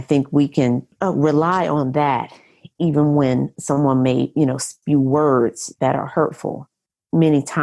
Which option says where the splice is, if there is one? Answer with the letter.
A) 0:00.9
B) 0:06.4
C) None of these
A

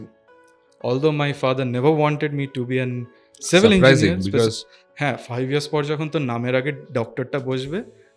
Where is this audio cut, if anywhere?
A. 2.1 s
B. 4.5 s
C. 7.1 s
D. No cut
B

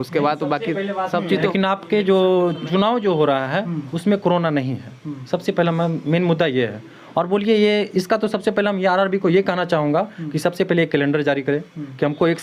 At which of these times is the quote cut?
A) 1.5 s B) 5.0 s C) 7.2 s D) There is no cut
A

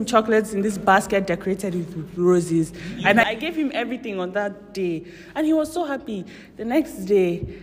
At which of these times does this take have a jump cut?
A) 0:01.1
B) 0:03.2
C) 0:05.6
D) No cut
B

